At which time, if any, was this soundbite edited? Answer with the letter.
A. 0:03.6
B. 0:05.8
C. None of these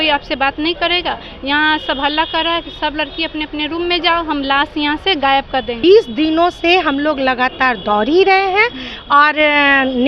B